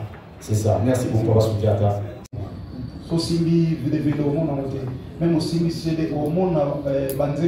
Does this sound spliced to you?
yes; 1 cut; at 2.1 s

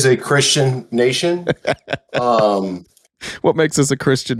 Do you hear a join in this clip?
no; 0 cuts

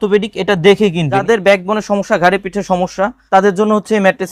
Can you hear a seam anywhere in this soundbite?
yes; 2 cuts; at 1.2 s, 3.2 s

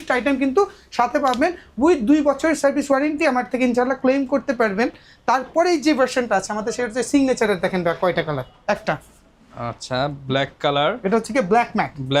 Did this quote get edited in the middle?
no; 0 cuts

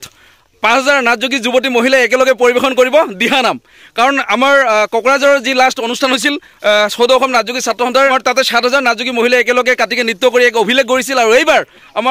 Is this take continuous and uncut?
no; 1 cut; at 8.2 s

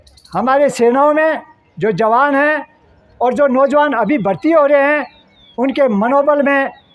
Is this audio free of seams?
yes; 0 cuts

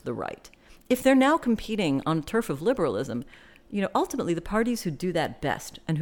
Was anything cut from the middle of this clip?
no; 0 cuts

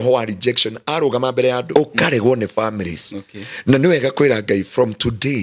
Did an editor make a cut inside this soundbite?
yes; 1 cut; at 1.7 s

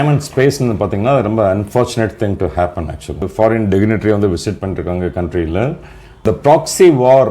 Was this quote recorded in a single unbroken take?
no; 2 cuts; at 3.3 s, 6.2 s

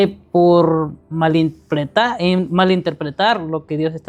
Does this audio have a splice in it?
no; 0 cuts

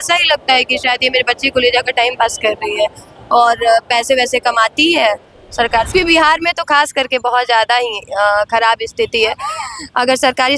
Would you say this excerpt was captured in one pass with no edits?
no; 1 cut; at 5.9 s

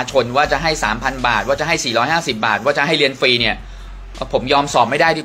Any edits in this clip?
no; 0 cuts

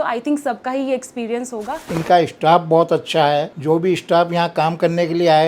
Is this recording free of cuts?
no; 1 cut; at 1.8 s

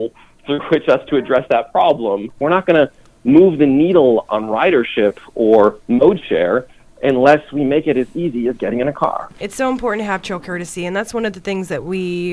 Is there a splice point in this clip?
yes; 3 cuts; at 2.4 s, 4.2 s, 9.4 s

